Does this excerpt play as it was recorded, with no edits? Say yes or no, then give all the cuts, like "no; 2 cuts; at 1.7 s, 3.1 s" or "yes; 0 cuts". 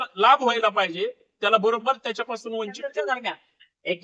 no; 1 cut; at 3.0 s